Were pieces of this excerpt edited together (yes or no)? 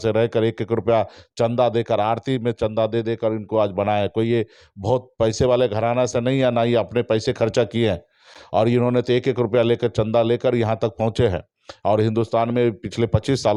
no